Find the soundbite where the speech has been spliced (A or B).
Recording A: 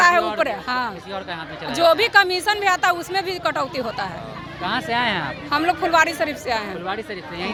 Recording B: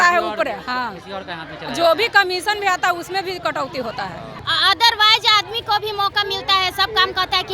B